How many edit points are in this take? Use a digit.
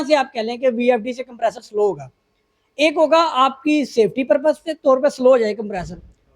0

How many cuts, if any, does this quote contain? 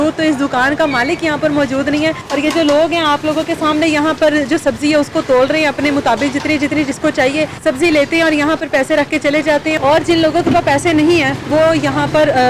3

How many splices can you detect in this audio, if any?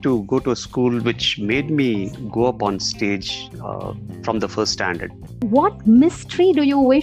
1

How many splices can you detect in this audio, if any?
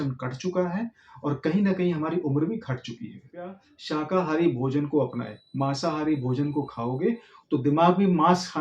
1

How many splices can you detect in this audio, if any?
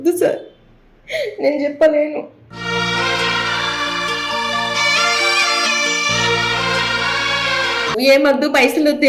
1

